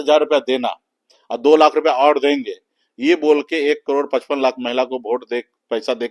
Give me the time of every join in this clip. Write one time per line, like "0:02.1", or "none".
none